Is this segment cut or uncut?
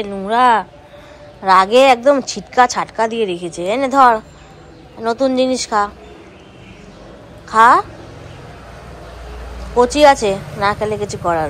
uncut